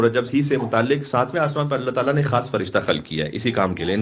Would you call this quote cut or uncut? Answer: uncut